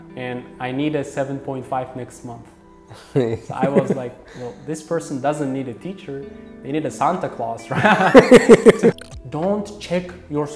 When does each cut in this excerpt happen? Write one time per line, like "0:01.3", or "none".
0:09.0